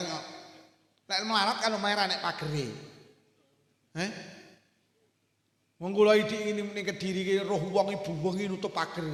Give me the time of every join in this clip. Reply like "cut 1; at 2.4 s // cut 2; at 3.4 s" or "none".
none